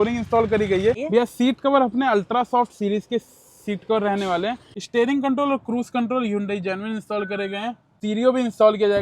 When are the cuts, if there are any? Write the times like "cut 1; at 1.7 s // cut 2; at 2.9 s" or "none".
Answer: cut 1; at 1.0 s // cut 2; at 4.7 s // cut 3; at 7.9 s